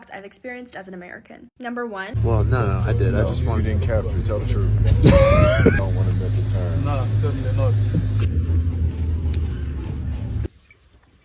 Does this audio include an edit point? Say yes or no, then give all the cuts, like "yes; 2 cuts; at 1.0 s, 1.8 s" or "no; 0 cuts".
yes; 1 cut; at 2.1 s